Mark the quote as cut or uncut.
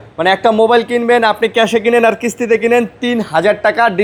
uncut